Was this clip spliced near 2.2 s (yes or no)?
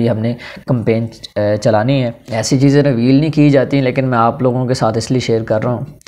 yes